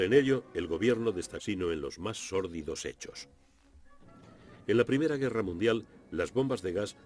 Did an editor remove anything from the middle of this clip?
no; 0 cuts

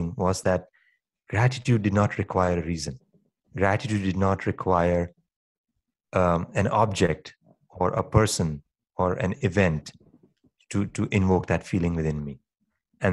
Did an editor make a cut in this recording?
no; 0 cuts

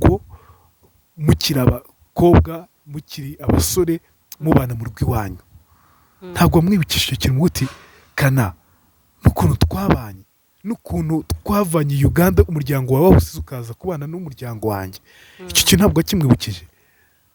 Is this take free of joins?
yes; 0 cuts

